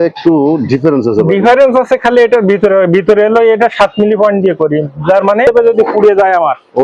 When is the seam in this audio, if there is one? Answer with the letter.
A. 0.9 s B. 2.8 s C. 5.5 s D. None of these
C